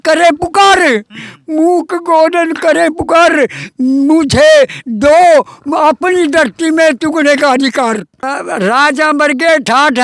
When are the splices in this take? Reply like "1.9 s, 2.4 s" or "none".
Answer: 8.4 s